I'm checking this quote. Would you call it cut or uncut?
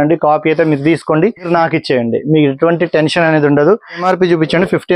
cut